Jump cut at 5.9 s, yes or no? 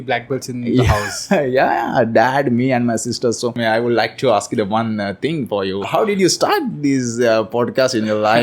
yes